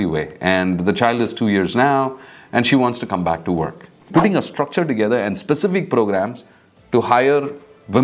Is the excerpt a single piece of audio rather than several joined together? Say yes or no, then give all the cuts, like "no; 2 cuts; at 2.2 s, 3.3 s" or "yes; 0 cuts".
no; 1 cut; at 4.0 s